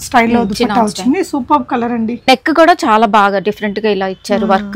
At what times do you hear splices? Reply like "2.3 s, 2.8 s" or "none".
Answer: 2.3 s